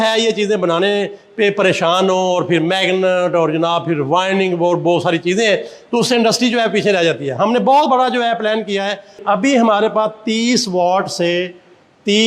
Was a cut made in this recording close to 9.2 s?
yes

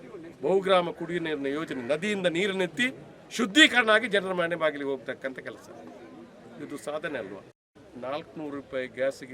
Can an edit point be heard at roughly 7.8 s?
yes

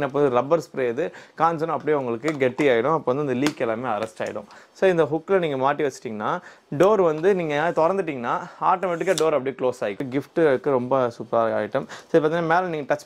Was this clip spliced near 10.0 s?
yes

